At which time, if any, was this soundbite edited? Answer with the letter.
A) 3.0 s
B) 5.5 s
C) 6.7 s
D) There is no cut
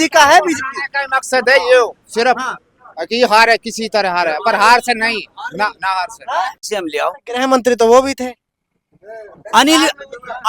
C